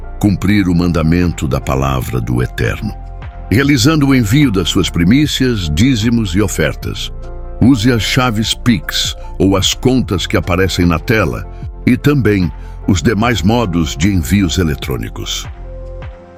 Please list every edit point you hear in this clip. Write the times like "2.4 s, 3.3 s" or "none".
none